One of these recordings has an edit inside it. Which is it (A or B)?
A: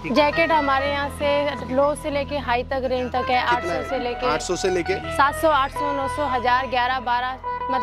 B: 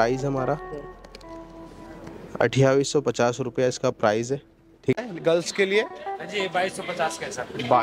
B